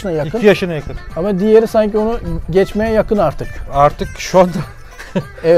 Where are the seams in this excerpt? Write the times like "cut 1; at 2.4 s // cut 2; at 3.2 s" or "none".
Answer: none